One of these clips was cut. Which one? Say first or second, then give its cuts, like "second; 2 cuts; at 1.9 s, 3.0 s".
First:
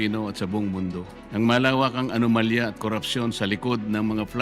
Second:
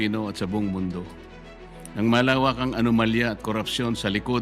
first; 1 cut; at 1.1 s